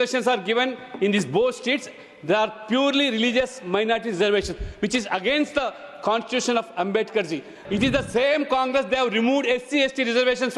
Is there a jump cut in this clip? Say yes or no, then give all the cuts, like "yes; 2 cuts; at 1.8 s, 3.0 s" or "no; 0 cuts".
yes; 1 cut; at 7.5 s